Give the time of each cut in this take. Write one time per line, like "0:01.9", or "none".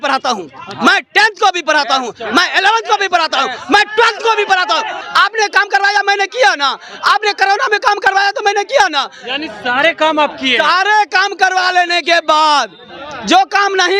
0:05.0